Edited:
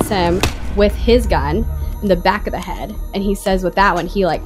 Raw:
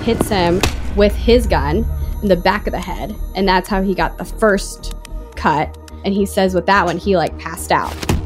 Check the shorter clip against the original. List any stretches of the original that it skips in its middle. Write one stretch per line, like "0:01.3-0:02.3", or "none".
0:03.2-0:05.9